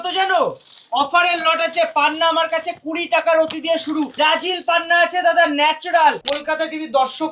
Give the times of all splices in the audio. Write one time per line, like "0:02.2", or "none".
0:04.1
0:06.2